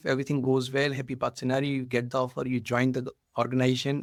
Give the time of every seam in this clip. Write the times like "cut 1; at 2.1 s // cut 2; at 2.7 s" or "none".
none